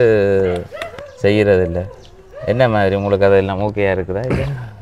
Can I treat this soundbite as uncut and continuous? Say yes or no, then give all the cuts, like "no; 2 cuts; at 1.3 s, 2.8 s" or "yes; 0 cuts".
yes; 0 cuts